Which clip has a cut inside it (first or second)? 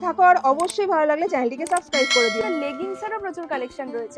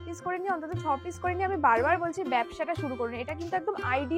first